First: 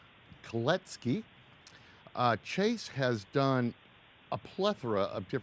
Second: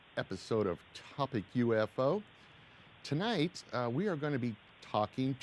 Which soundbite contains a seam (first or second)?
first